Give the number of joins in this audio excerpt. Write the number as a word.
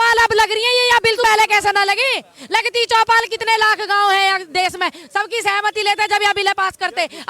one